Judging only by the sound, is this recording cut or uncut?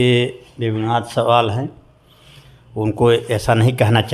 uncut